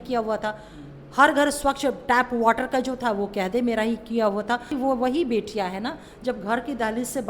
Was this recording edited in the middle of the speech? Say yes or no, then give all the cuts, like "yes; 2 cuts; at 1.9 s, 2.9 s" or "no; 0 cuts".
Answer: yes; 1 cut; at 4.7 s